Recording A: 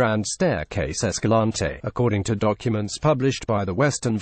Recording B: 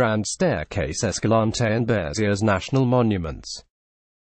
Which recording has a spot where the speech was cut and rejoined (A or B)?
A